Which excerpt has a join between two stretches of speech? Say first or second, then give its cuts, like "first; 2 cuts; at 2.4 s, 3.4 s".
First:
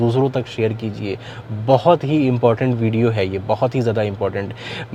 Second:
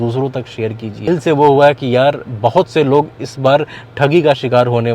second; 1 cut; at 1.1 s